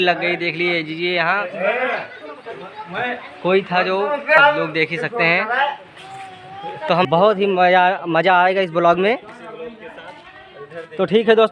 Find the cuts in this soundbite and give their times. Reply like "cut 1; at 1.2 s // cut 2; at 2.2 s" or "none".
cut 1; at 4.4 s // cut 2; at 7.0 s